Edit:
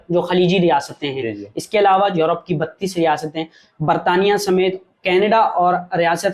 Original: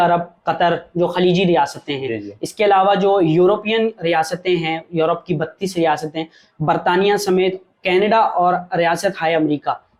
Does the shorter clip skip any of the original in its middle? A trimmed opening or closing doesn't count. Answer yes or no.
yes